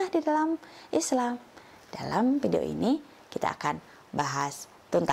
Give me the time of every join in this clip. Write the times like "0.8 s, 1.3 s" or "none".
none